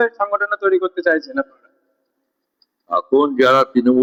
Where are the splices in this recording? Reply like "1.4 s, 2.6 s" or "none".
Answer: none

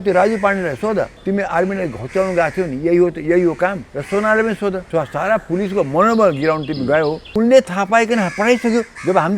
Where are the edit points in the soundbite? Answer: 1.2 s, 3.9 s, 4.8 s, 7.2 s

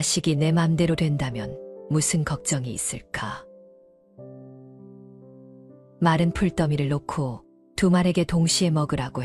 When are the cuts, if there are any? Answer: none

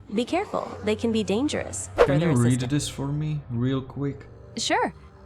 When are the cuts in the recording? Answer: 2.0 s

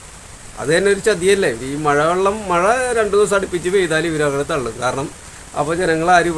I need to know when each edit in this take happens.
none

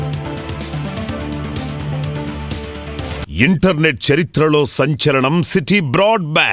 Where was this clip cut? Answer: 3.3 s

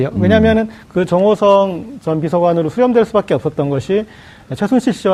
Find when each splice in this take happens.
none

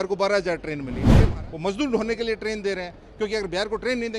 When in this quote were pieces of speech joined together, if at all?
1.0 s

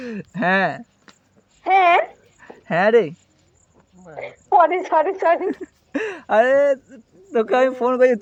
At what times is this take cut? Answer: none

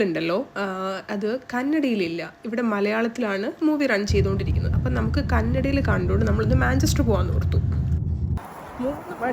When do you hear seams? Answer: 8.4 s

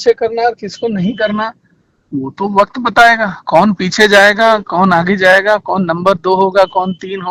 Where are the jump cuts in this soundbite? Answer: none

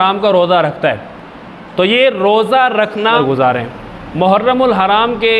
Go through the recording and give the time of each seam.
3.2 s

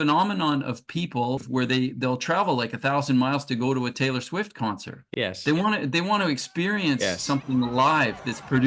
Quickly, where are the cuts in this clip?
1.4 s, 5.0 s

